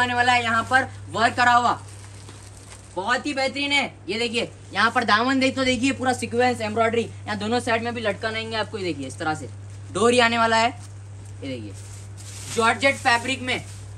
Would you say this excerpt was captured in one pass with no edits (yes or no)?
yes